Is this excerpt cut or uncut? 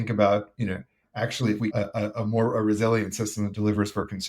cut